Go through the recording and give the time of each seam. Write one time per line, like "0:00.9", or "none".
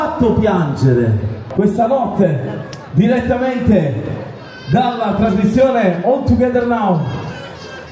0:01.4

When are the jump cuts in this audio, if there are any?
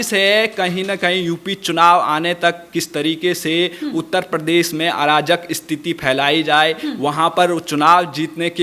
none

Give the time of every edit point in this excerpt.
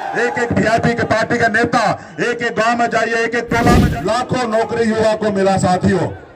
0:03.9

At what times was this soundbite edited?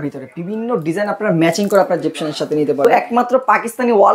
0:02.8

